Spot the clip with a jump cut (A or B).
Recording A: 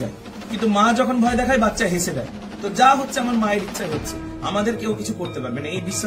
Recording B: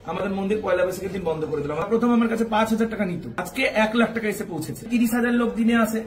B